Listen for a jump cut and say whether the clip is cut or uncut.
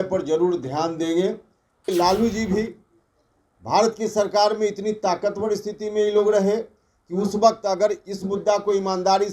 cut